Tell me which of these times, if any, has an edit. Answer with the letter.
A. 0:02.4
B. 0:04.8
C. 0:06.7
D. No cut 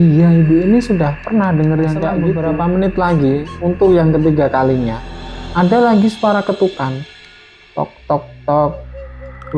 A